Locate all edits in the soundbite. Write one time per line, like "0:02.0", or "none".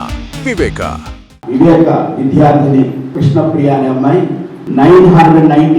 none